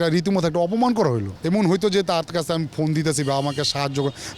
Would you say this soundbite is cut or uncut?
cut